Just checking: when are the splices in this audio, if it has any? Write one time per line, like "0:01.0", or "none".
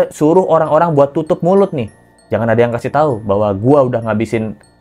none